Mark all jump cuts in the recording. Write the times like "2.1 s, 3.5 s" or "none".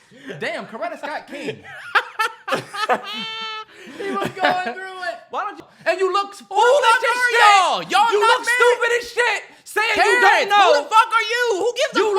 5.6 s